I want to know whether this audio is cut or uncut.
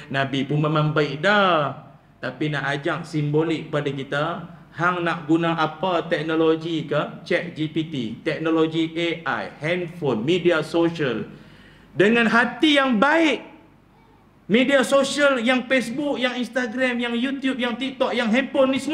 uncut